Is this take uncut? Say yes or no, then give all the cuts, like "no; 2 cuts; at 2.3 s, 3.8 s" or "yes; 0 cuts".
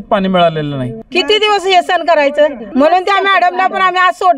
no; 2 cuts; at 0.9 s, 2.6 s